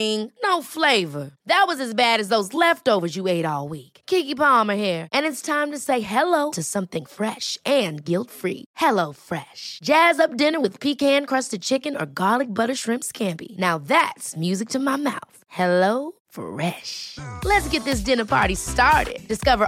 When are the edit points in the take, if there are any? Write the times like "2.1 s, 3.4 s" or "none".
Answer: none